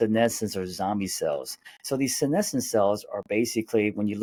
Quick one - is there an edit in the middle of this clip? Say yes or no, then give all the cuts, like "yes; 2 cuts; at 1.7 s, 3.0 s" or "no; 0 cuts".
no; 0 cuts